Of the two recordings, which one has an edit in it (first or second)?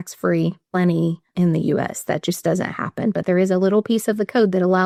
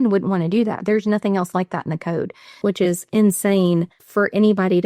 second